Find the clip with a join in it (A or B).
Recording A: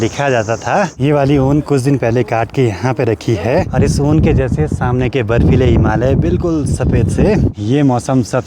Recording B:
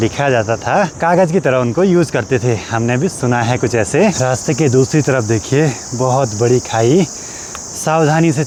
A